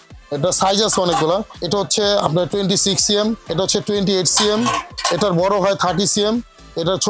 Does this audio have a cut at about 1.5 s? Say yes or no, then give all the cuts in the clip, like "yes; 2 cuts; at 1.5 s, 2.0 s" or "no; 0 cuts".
yes; 2 cuts; at 1.5 s, 3.4 s